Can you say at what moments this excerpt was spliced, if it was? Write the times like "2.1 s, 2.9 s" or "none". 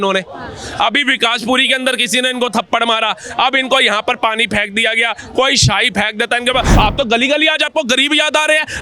6.7 s